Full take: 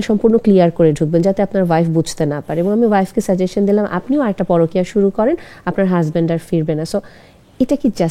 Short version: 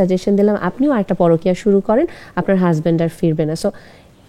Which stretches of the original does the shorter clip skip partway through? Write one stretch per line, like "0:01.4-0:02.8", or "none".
none